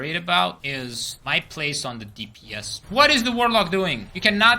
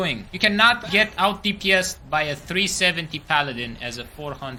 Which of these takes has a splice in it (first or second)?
first